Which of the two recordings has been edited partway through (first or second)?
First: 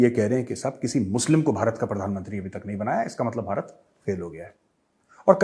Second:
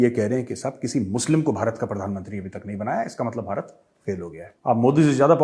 second